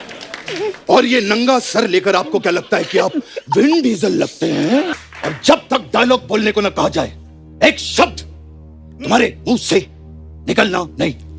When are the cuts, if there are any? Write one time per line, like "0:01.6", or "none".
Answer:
0:05.0